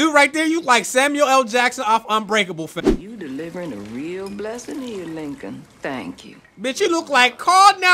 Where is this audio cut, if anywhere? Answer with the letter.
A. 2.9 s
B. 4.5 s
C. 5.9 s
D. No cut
A